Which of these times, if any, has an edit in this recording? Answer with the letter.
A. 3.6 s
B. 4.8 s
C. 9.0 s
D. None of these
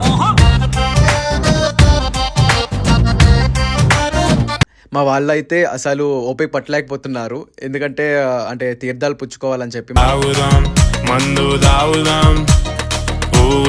B